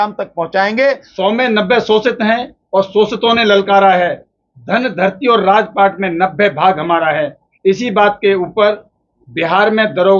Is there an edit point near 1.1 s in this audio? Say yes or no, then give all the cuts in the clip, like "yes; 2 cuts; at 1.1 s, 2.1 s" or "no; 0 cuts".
yes; 1 cut; at 1.1 s